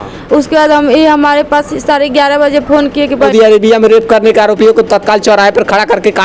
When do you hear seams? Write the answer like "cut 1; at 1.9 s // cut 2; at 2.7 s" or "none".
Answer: cut 1; at 3.3 s